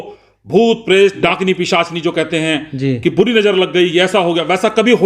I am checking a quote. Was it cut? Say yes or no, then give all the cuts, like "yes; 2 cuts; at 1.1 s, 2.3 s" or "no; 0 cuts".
yes; 1 cut; at 1.2 s